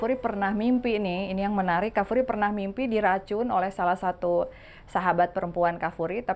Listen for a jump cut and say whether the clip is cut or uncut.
uncut